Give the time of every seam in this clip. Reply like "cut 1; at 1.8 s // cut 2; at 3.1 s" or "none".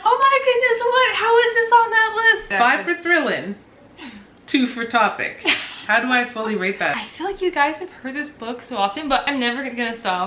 cut 1; at 2.5 s // cut 2; at 6.9 s // cut 3; at 9.2 s